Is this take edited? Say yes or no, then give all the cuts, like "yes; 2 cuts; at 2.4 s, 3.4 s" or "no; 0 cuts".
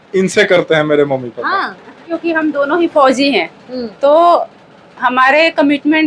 yes; 1 cut; at 2.1 s